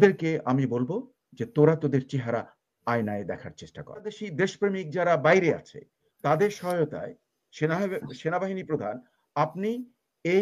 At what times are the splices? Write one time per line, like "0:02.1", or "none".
0:04.2